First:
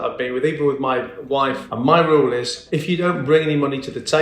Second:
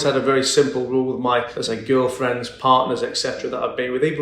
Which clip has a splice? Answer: first; 1 cut; at 1.6 s

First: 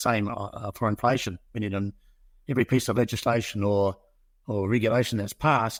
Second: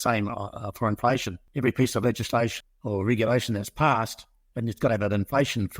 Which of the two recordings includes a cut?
second; 2 cuts; at 1.4 s, 2.6 s

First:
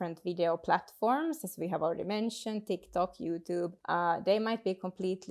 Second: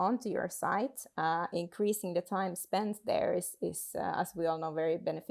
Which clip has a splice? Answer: first; 1 cut; at 3.8 s

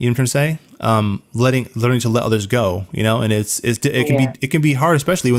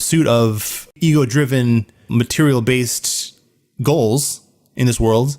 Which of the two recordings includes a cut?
second; 2 cuts; at 1.0 s, 2.1 s

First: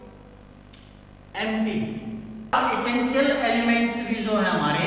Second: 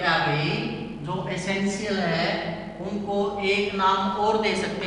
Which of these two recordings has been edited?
first; 1 cut; at 2.5 s

